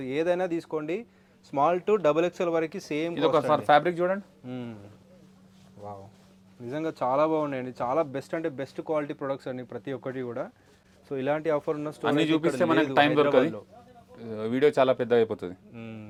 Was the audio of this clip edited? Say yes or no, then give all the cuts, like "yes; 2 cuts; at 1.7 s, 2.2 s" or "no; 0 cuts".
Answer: no; 0 cuts